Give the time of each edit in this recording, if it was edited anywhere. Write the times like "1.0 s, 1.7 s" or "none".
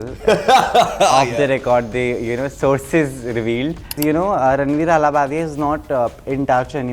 4.0 s